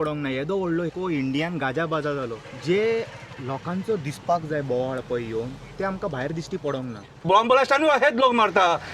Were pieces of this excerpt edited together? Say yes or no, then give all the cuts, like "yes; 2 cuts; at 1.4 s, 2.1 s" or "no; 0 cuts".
yes; 3 cuts; at 0.9 s, 2.4 s, 7.2 s